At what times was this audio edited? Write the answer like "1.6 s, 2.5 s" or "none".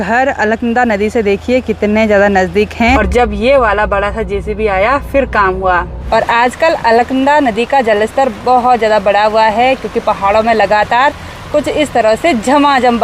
3.0 s, 5.9 s